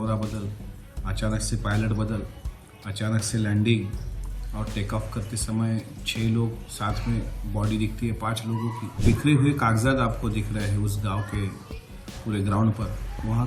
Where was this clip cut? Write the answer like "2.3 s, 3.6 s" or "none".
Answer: 8.9 s

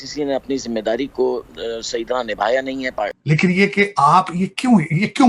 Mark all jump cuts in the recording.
3.2 s

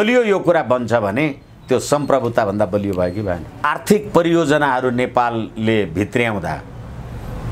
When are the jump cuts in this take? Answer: 3.6 s

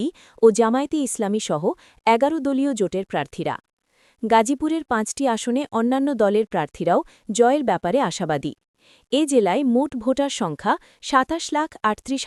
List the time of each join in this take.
none

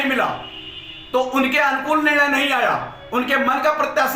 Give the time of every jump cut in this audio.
none

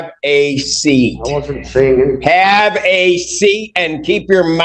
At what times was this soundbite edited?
none

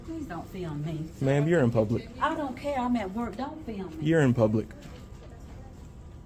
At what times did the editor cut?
none

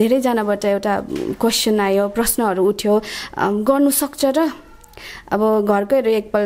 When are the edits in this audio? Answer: none

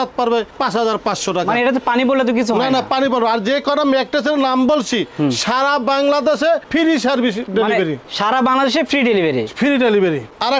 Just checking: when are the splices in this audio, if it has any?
none

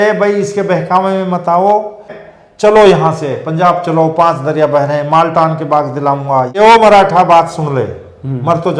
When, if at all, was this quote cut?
2.2 s, 6.5 s

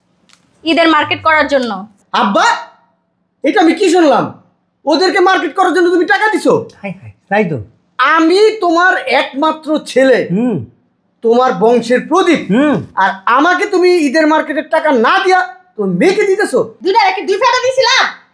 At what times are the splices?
16.7 s

